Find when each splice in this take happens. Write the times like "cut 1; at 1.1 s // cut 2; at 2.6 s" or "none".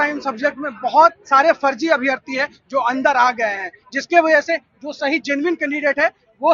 none